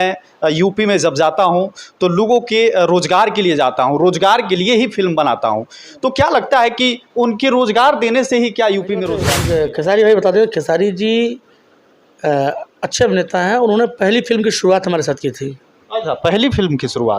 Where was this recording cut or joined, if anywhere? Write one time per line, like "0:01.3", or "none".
0:09.3